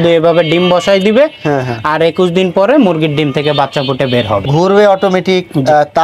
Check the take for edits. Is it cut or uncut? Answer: uncut